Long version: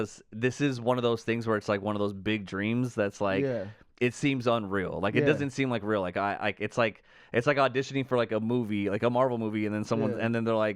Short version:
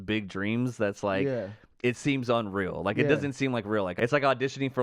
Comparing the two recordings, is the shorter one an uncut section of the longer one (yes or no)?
no